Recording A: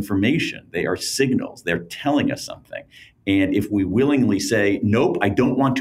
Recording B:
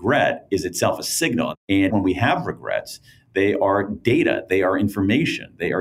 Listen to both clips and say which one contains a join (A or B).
B